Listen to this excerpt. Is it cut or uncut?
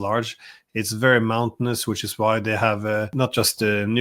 cut